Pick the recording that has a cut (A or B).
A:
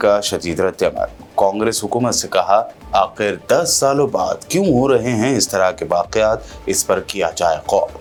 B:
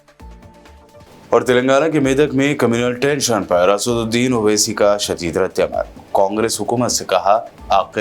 B